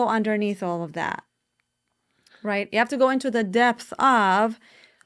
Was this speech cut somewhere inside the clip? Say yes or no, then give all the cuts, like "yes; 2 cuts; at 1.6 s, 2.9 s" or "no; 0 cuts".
no; 0 cuts